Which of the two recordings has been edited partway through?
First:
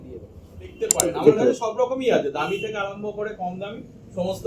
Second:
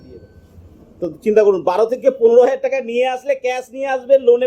first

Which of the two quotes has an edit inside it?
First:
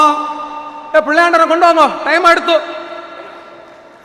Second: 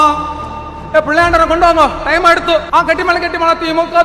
second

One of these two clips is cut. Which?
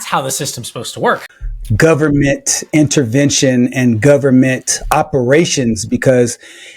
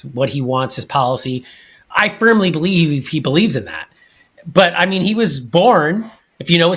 first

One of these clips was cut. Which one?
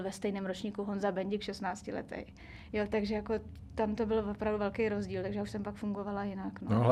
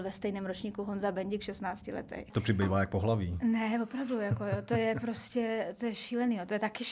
second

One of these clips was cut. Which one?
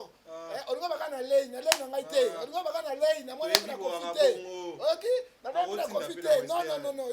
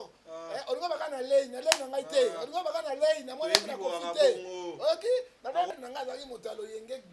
second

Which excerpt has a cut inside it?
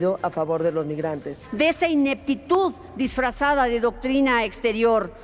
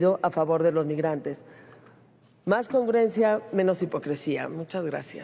first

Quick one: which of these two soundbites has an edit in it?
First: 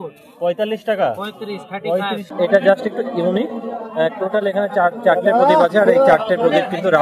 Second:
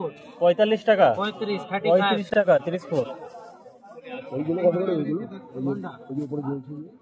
first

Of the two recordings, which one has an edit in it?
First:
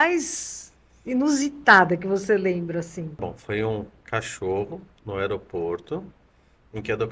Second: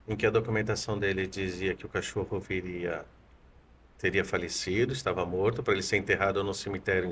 first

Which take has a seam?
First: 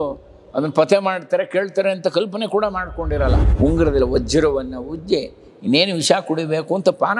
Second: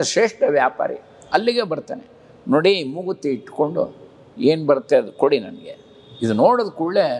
first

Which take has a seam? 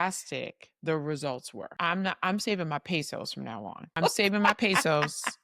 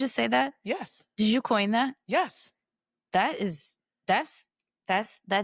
first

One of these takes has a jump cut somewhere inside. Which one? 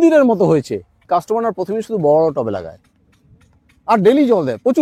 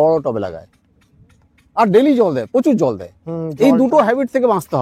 first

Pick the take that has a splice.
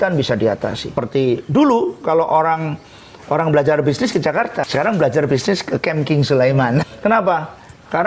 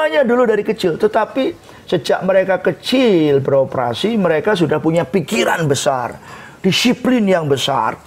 first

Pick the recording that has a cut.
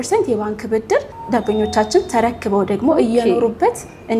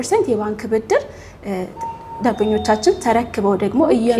first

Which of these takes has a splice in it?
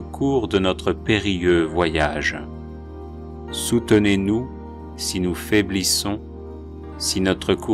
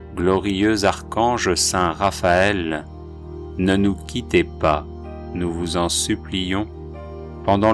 first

